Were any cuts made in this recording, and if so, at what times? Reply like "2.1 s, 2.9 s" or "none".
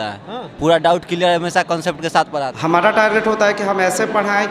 2.5 s